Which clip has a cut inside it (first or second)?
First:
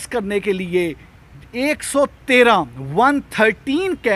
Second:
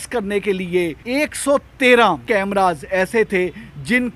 second